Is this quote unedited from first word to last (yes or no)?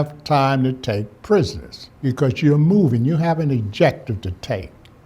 no